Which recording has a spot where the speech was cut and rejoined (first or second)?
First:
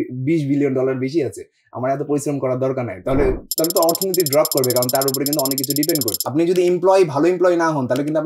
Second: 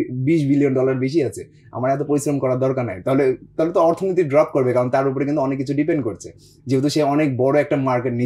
first